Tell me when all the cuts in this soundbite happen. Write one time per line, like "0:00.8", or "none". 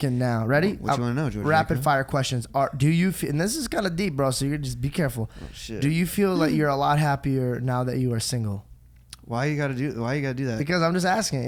none